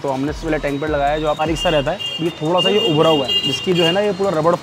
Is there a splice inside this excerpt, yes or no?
yes